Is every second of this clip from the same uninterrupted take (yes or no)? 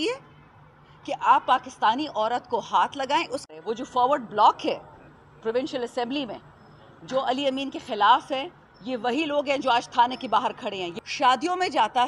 no